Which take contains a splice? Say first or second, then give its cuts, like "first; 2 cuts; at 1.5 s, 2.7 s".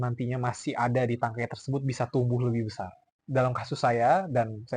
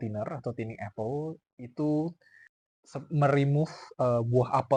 first; 1 cut; at 3.2 s